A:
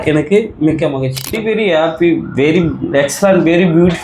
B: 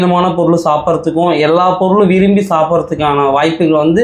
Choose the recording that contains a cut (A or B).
A